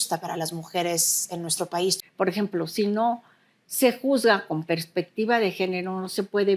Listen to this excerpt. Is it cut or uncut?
cut